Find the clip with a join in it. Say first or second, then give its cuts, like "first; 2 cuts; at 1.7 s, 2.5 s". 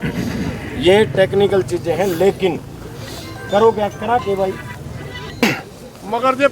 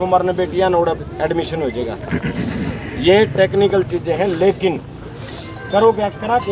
first; 1 cut; at 5.4 s